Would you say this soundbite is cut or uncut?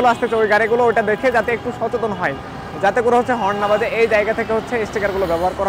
uncut